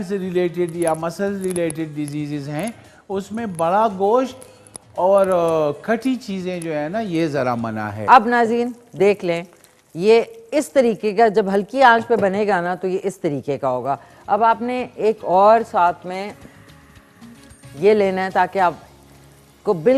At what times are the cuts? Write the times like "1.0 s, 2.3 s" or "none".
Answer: 7.9 s